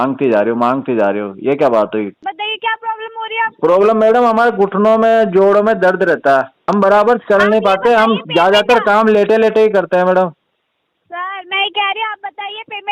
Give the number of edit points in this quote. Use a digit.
2